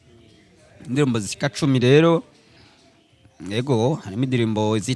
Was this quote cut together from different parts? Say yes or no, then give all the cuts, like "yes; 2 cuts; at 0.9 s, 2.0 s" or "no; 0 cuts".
no; 0 cuts